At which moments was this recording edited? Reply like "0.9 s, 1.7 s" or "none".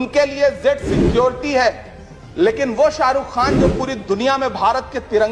none